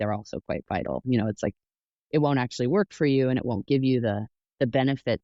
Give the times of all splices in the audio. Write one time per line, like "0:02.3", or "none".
none